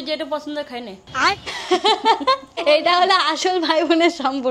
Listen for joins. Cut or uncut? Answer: cut